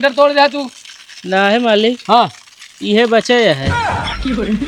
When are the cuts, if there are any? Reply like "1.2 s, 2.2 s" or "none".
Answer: 3.7 s